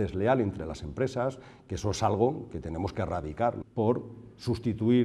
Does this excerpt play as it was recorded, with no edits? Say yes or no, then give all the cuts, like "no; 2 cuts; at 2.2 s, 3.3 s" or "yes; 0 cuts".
no; 1 cut; at 3.6 s